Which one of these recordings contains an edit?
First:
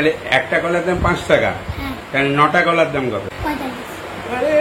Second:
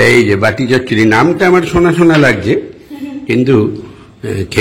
first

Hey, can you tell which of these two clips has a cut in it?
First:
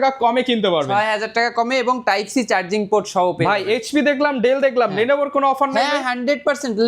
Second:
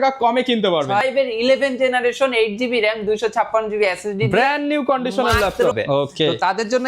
second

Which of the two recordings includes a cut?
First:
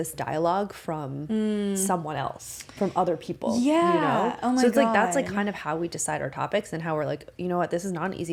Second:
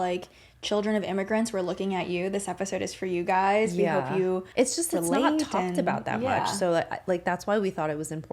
second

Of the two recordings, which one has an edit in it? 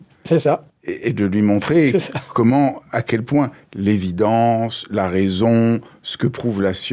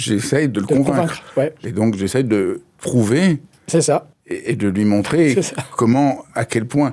second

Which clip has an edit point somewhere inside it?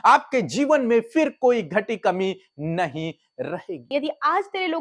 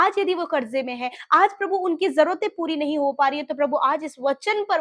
first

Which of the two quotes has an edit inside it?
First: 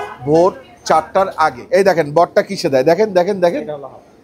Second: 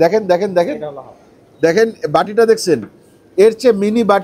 first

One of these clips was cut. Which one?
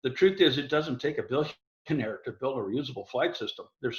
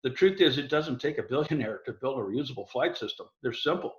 second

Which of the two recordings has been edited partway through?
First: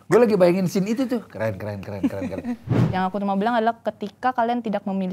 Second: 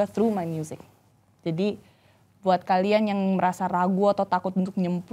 first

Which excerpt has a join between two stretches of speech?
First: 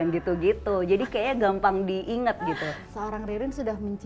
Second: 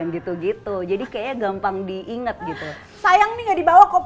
first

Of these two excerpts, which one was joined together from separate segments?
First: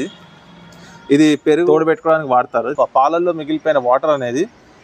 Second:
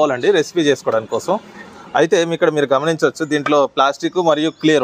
first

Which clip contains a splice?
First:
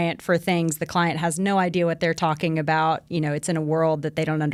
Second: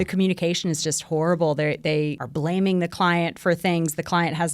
second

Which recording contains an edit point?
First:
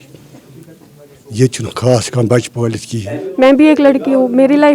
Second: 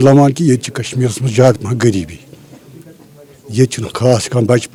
first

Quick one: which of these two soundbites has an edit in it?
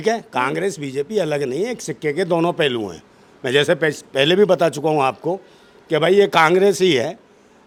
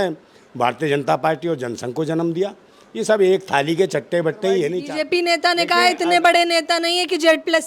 second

